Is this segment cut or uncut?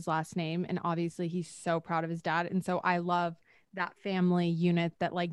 uncut